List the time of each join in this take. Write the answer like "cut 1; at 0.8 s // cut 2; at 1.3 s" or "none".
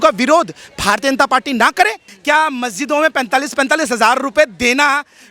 cut 1; at 2.1 s